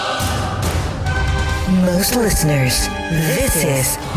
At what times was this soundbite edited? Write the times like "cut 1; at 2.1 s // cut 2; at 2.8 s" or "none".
none